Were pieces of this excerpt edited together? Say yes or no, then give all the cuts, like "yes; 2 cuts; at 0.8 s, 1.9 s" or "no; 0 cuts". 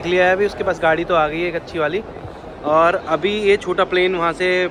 no; 0 cuts